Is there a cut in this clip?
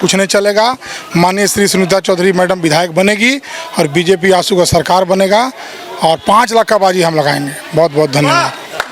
no; 0 cuts

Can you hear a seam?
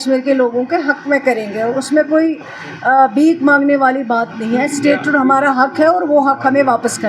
no; 0 cuts

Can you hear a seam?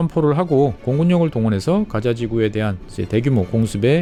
no; 0 cuts

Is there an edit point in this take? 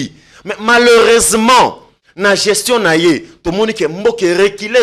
no; 0 cuts

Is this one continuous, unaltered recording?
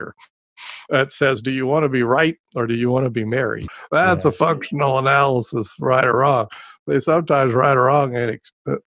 no; 1 cut; at 3.6 s

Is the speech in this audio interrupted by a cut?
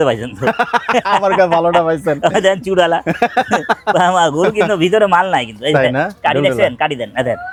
no; 0 cuts

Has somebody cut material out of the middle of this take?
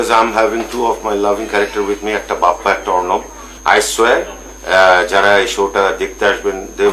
no; 0 cuts

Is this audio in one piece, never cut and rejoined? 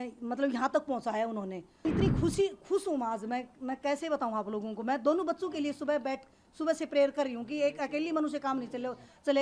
no; 1 cut; at 1.8 s

